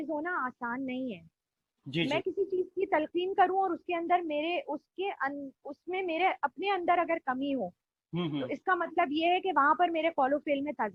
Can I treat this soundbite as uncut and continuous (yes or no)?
yes